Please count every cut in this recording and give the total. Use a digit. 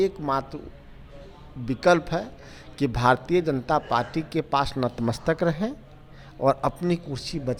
0